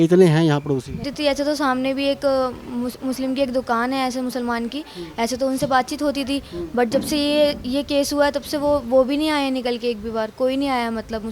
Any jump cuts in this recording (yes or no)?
yes